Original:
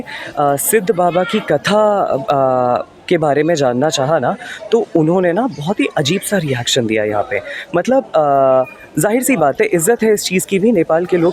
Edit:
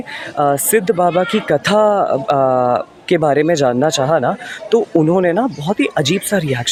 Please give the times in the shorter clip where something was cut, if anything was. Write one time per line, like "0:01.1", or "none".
none